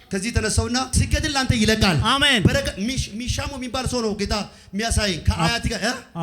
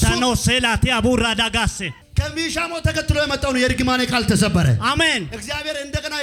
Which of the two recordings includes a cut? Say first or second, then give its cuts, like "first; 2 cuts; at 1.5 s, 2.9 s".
first; 1 cut; at 1.0 s